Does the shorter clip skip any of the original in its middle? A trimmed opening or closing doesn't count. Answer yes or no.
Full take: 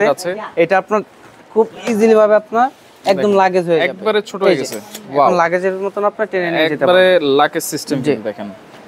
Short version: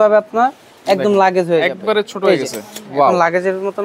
no